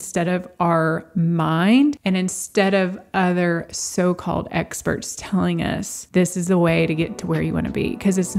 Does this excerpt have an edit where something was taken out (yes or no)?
no